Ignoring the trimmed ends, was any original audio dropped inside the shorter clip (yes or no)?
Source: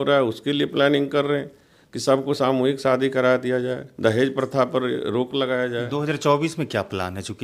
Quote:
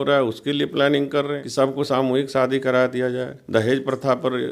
yes